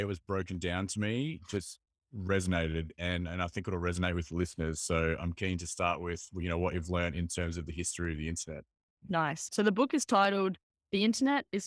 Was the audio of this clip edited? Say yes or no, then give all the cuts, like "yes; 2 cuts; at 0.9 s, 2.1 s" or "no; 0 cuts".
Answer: yes; 1 cut; at 9.5 s